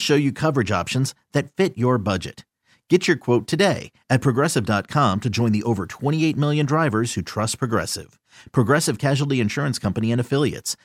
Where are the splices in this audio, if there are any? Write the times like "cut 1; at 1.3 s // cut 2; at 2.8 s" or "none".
none